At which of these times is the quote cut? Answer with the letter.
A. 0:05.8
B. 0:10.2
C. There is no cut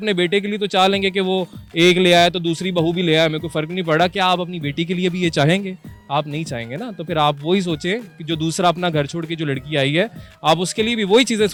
C